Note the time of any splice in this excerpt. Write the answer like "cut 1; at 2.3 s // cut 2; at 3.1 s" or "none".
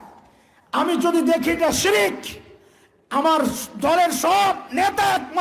none